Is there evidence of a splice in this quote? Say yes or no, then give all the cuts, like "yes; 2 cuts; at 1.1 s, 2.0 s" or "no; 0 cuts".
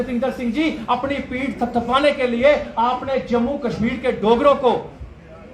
no; 0 cuts